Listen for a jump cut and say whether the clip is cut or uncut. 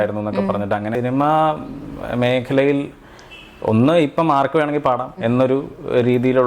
cut